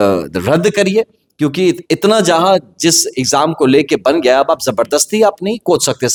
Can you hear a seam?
no; 0 cuts

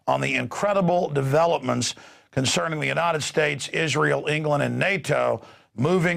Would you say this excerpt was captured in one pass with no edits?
yes; 0 cuts

